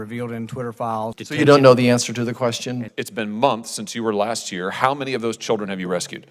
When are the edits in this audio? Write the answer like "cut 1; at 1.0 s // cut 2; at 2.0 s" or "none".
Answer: cut 1; at 1.2 s // cut 2; at 2.9 s

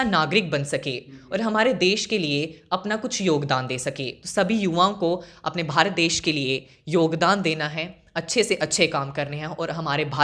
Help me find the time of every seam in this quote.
cut 1; at 4.1 s

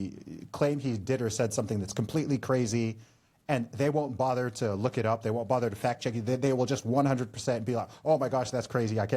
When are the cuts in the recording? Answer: none

